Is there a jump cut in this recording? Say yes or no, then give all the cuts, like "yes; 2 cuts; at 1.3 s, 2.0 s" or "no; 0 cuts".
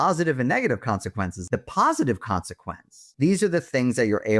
yes; 2 cuts; at 1.4 s, 3.0 s